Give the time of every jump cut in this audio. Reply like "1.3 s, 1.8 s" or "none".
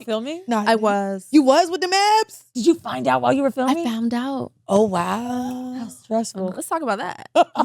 2.4 s, 6.4 s

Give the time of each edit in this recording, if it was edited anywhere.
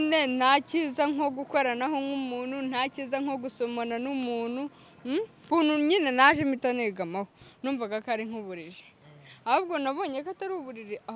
5.4 s

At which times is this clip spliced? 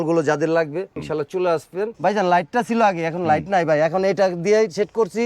1.0 s, 1.9 s

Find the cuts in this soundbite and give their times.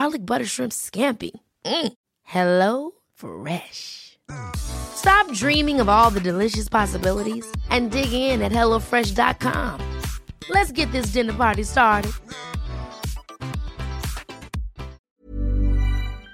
15.0 s

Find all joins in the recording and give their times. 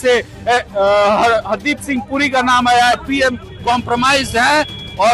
3.0 s

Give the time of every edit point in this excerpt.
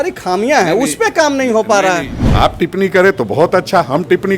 2.1 s

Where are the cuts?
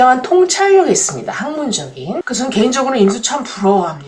2.3 s

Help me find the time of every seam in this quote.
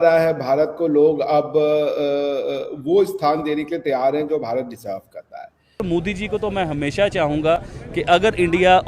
5.8 s

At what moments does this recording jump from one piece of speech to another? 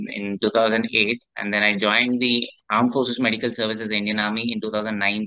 2.6 s

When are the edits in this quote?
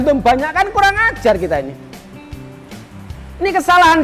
none

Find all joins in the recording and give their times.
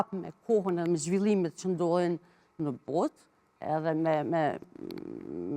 none

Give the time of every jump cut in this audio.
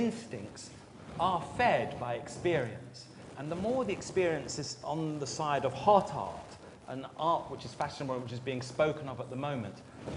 9.2 s

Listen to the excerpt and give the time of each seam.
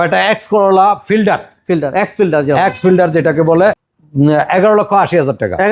3.9 s

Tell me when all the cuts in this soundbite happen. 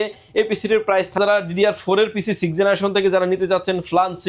1.2 s

